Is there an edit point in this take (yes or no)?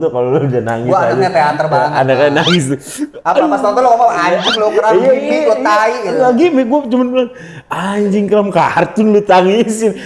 no